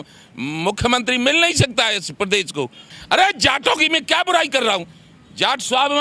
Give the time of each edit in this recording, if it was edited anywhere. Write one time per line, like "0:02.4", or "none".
0:02.9